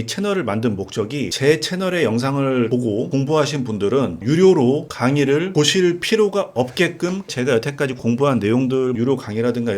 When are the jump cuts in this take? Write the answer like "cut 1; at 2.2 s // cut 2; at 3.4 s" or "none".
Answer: cut 1; at 1.3 s // cut 2; at 2.8 s // cut 3; at 4.9 s // cut 4; at 7.3 s // cut 5; at 9.0 s